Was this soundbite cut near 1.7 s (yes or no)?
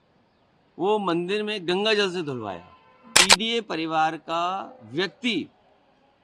no